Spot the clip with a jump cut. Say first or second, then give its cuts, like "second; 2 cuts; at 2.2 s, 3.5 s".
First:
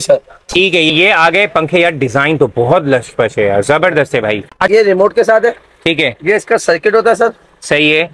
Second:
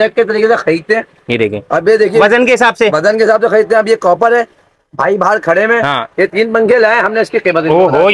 first; 2 cuts; at 0.9 s, 4.6 s